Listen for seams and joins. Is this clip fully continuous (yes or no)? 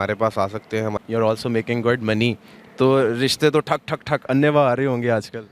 no